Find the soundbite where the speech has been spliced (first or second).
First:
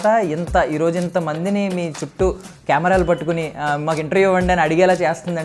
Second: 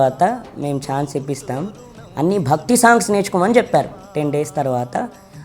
second